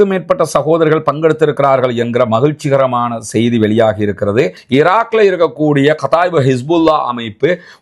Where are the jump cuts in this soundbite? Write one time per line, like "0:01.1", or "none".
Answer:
0:04.6